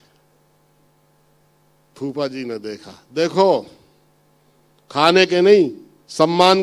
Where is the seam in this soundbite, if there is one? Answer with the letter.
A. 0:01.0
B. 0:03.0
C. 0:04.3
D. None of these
D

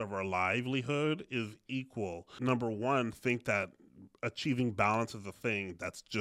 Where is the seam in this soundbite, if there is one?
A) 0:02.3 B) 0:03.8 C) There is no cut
A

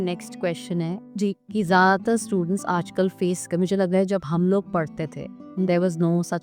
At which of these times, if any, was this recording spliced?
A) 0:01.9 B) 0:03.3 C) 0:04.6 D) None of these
D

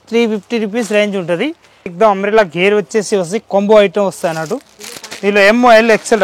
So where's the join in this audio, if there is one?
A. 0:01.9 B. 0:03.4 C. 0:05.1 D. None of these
A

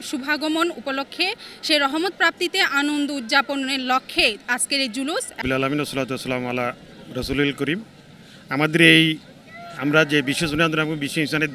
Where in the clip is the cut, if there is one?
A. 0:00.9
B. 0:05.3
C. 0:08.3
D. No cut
B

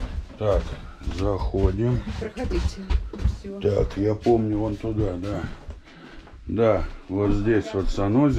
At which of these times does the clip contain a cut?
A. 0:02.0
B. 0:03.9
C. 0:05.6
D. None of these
D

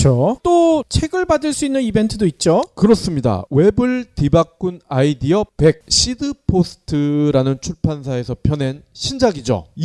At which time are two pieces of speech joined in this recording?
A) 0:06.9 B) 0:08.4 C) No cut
B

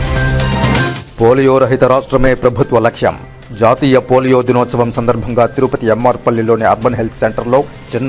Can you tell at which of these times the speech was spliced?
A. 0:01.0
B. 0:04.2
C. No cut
A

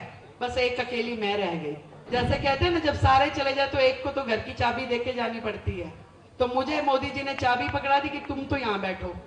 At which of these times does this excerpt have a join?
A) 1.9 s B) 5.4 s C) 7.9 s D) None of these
A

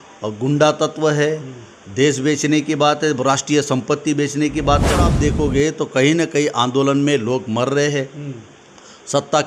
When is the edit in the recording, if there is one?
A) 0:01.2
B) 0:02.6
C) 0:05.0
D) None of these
C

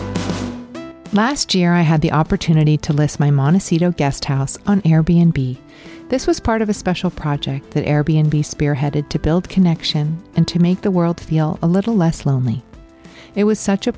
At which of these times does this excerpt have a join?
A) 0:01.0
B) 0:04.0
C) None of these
A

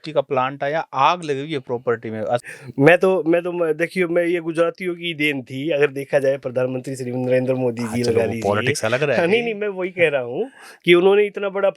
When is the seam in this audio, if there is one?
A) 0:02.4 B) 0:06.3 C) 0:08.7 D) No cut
A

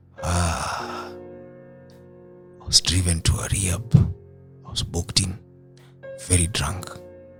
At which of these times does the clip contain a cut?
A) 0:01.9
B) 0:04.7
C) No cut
C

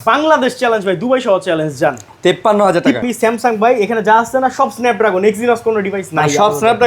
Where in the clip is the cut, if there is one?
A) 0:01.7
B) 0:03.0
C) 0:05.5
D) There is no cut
B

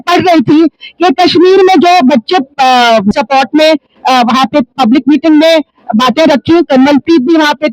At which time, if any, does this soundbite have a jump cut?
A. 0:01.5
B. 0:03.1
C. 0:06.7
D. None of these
B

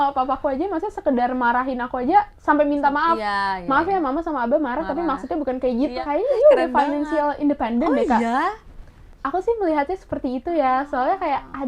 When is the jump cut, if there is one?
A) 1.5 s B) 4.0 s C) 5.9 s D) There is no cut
C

